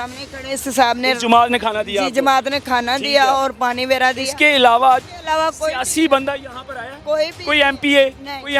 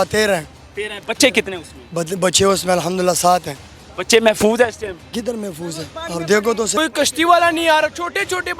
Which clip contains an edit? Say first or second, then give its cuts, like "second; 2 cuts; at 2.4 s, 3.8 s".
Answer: second; 1 cut; at 6.7 s